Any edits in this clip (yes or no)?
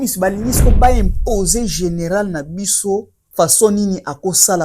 yes